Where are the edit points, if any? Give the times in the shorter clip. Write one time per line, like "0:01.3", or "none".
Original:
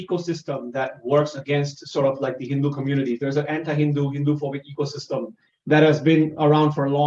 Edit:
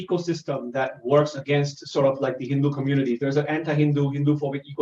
none